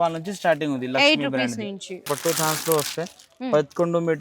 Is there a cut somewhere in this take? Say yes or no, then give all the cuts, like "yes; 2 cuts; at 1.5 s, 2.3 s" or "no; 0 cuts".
yes; 1 cut; at 2.1 s